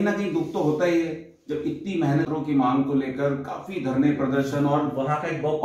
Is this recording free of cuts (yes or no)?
no